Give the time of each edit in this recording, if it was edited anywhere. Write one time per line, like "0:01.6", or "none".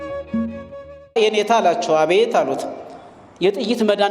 none